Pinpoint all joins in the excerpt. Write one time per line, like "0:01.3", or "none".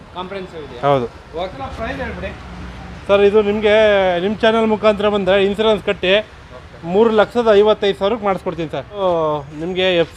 0:01.5
0:09.0